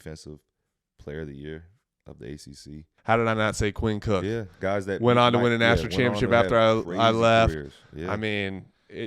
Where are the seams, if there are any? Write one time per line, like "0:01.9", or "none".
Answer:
0:02.9